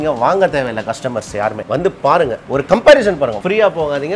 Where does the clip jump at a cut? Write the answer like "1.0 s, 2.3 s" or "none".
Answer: 1.6 s